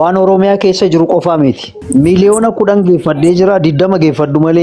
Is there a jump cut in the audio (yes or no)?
yes